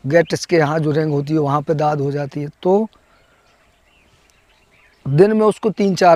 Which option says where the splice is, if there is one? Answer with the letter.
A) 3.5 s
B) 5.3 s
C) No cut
C